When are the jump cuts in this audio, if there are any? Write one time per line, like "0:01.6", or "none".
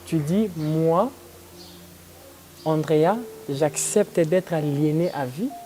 none